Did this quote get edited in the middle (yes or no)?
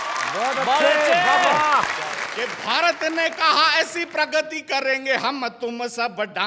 yes